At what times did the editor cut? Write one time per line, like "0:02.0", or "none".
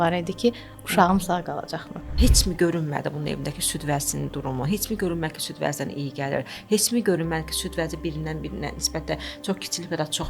0:02.2